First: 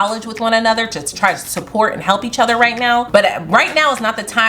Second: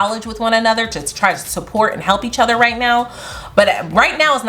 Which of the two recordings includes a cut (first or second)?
first